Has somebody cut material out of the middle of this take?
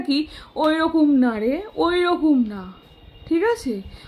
no; 0 cuts

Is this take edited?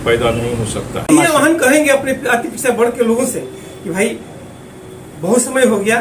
yes; 1 cut; at 1.1 s

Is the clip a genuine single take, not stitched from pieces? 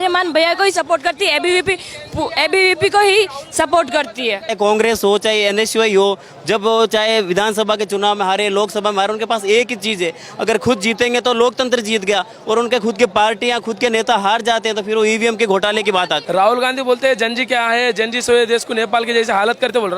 no; 2 cuts; at 4.5 s, 16.2 s

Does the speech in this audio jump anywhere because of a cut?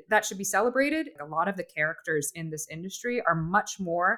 yes; 1 cut; at 1.1 s

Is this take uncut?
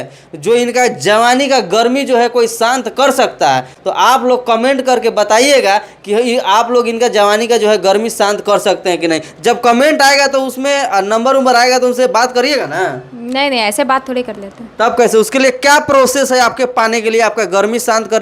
yes; 0 cuts

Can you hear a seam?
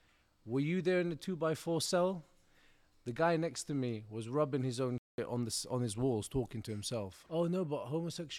yes; 1 cut; at 7.2 s

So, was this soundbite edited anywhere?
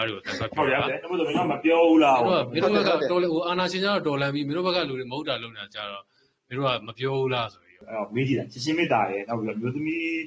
yes; 1 cut; at 7.7 s

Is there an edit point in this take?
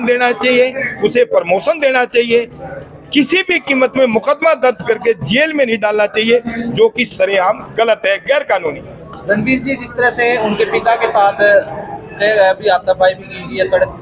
no; 0 cuts

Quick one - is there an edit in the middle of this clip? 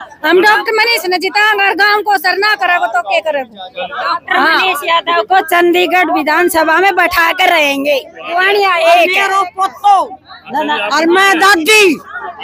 yes; 1 cut; at 8.2 s

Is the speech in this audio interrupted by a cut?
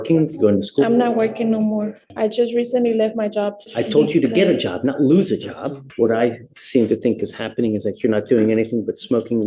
yes; 3 cuts; at 2.0 s, 3.6 s, 5.8 s

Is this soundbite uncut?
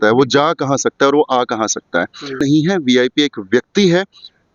no; 1 cut; at 2.4 s

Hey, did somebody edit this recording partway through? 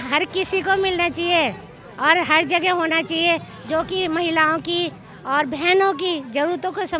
no; 0 cuts

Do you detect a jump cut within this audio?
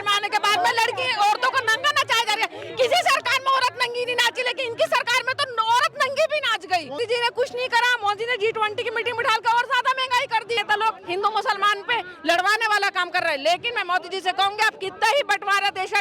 yes; 2 cuts; at 7.0 s, 10.6 s

